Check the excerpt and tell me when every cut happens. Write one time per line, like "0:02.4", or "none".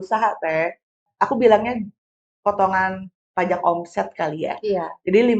0:01.1